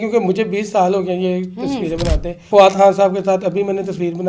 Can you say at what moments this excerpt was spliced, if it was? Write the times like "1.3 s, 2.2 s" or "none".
2.4 s